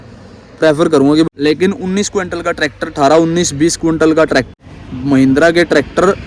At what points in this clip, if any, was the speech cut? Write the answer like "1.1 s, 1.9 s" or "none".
1.3 s, 4.5 s